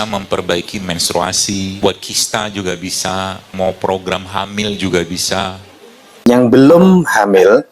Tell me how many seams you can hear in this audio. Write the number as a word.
three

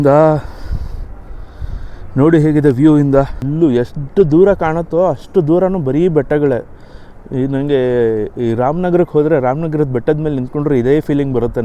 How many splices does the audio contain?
one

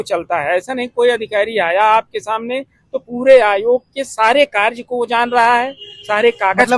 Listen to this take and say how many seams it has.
zero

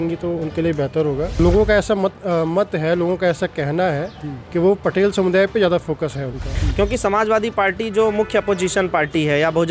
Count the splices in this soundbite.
two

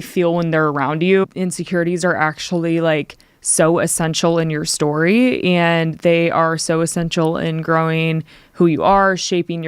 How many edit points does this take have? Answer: one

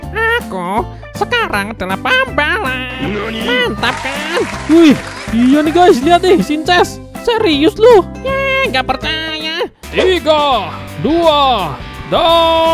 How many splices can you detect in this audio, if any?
one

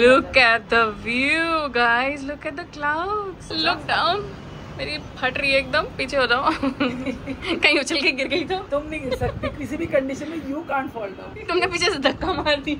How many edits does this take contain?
two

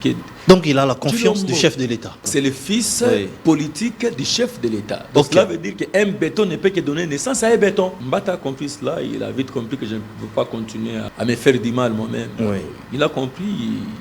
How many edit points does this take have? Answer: three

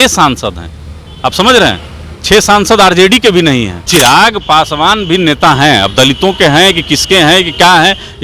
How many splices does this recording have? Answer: one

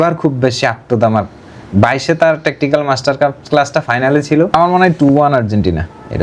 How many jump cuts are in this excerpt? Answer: one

